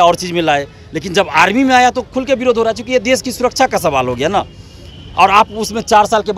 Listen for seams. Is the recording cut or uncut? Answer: uncut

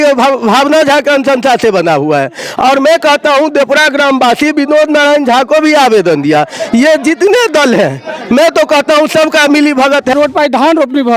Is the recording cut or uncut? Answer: cut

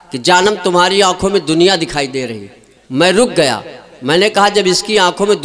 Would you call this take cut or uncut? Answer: uncut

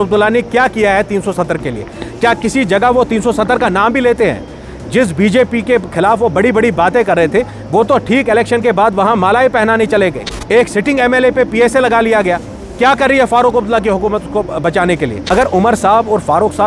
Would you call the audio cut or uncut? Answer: cut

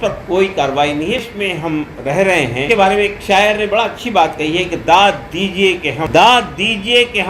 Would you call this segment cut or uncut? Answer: cut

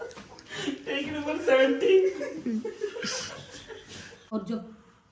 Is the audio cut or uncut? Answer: cut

